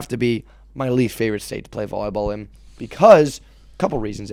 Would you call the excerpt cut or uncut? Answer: uncut